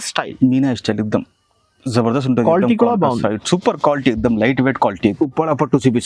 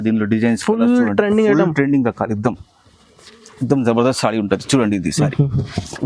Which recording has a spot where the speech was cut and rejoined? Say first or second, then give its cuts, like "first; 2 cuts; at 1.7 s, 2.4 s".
first; 1 cut; at 5.0 s